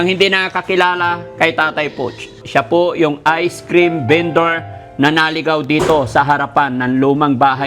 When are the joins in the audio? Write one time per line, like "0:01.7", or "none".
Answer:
0:02.4